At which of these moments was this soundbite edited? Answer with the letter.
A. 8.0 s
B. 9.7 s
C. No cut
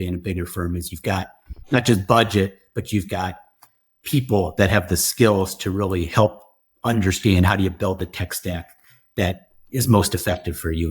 B